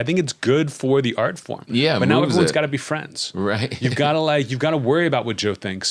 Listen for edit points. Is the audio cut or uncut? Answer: uncut